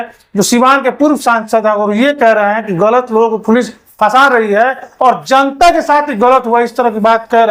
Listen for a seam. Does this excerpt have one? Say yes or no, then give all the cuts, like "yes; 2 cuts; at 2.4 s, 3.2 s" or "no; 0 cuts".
no; 0 cuts